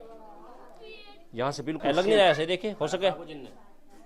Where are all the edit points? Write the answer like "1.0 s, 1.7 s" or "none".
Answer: 1.8 s